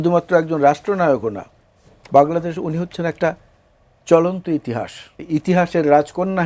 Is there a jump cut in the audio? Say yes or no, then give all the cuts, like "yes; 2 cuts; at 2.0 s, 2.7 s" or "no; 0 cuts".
yes; 1 cut; at 5.2 s